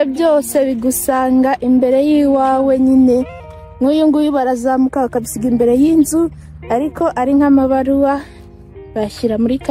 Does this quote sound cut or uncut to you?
uncut